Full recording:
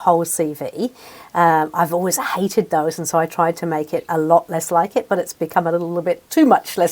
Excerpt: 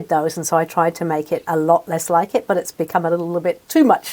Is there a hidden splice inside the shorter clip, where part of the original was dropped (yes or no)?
no